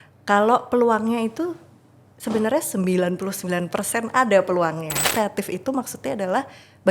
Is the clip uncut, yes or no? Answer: no